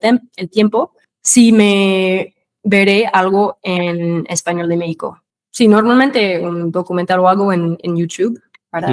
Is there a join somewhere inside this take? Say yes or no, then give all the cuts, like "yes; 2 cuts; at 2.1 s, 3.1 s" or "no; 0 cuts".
no; 0 cuts